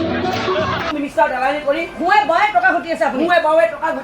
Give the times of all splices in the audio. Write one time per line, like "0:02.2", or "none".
0:00.9

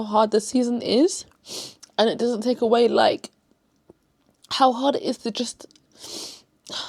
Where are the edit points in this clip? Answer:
none

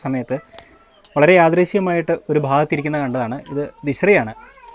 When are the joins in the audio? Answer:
none

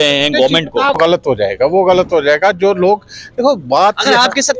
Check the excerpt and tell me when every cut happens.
0:01.3

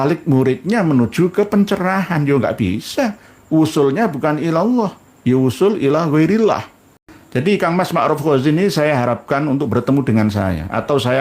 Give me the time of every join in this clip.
0:07.3

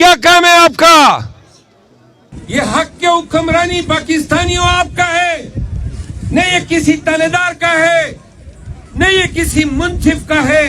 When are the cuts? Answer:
0:02.4

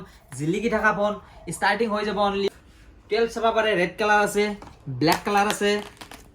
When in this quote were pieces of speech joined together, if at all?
0:02.5

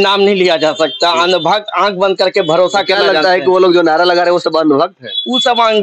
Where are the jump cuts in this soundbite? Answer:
none

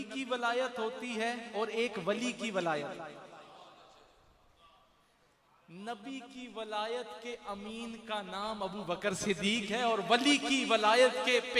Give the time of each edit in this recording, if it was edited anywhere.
none

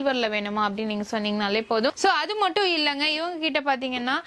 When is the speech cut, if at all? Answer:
none

